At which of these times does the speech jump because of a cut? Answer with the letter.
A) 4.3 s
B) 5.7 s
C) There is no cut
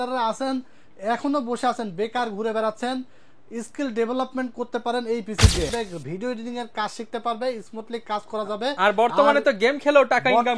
B